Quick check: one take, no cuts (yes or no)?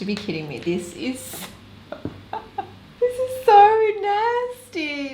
no